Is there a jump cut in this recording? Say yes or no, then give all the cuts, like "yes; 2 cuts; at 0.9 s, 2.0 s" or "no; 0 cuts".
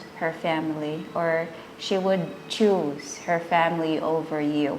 no; 0 cuts